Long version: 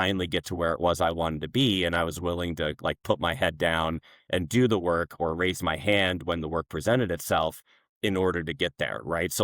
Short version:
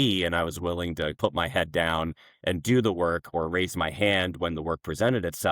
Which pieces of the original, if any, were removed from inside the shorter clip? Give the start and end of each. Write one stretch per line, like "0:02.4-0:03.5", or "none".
0:02.7-0:03.0